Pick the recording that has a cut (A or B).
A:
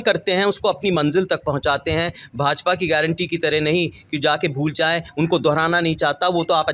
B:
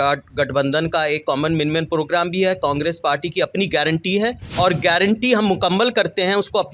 B